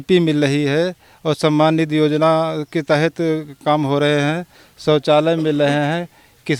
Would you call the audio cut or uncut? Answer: uncut